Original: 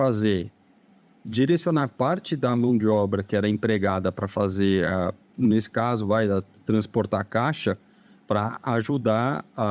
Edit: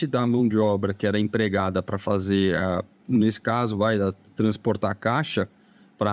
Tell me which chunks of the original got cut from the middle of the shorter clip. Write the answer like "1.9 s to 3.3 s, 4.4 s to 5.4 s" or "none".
none